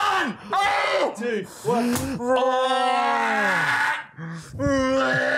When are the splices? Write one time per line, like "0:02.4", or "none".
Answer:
none